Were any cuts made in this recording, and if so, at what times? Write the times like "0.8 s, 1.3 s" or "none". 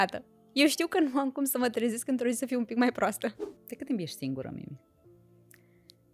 3.4 s